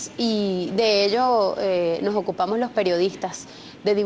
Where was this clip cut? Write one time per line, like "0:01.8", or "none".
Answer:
none